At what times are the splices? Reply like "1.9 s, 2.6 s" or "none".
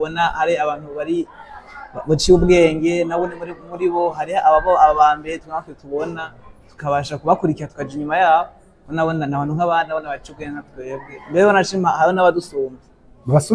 none